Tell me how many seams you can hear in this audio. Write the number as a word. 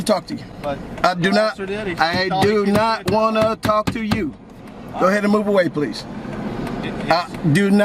zero